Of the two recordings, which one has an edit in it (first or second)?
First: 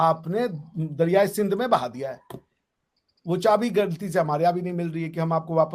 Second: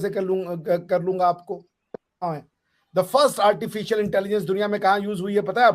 second